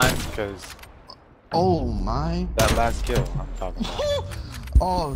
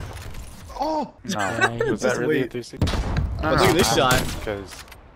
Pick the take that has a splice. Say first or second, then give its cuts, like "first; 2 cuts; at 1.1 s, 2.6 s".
second; 2 cuts; at 1.2 s, 2.7 s